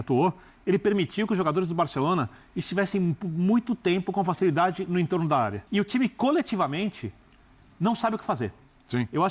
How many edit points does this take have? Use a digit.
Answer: 1